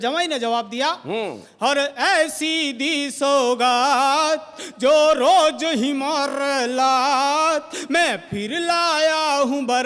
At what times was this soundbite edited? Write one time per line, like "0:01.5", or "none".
none